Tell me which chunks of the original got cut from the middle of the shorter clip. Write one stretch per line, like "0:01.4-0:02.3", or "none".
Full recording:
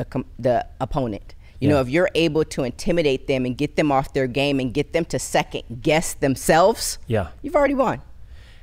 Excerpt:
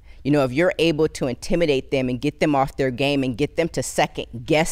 none